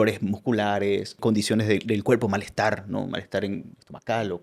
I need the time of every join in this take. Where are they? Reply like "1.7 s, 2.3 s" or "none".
1.2 s